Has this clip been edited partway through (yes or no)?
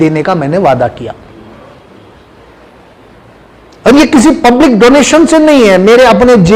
no